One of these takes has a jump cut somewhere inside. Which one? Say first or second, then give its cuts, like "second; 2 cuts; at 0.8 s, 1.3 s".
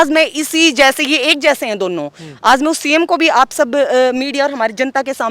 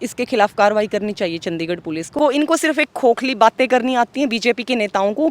second; 1 cut; at 2.2 s